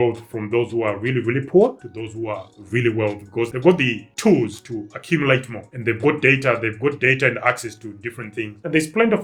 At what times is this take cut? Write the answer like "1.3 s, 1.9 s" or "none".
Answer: none